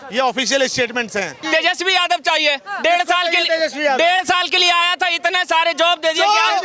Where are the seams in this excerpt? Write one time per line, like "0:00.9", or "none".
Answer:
0:01.4

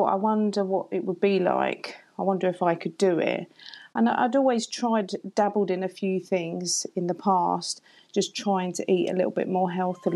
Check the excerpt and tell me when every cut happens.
none

